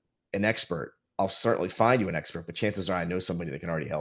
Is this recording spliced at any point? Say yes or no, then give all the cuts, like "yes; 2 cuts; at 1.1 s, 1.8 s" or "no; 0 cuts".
no; 0 cuts